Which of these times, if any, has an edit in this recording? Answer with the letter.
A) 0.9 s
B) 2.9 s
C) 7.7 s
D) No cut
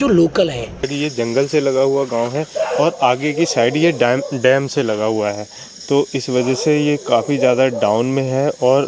A